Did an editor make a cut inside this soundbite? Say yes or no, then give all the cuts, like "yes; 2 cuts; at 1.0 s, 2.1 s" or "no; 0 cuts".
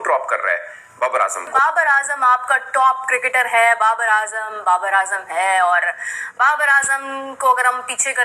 yes; 1 cut; at 1.5 s